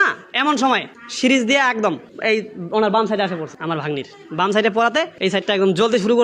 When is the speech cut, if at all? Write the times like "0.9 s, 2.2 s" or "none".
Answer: 3.5 s, 5.1 s